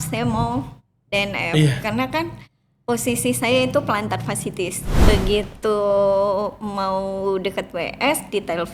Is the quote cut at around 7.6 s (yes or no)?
no